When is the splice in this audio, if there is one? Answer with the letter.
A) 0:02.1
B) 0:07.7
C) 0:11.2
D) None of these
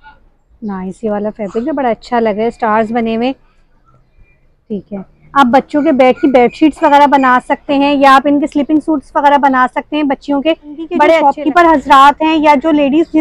C